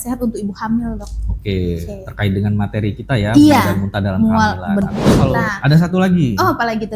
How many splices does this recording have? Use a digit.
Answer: 1